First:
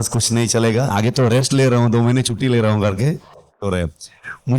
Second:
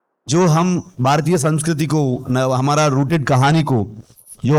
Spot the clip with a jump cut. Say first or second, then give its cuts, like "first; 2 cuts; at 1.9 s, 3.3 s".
first; 2 cuts; at 0.9 s, 3.6 s